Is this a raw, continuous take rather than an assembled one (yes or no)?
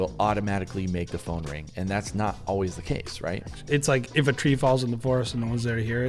no